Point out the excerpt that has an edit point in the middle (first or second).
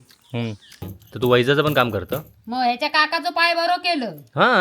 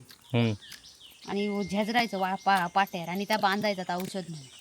first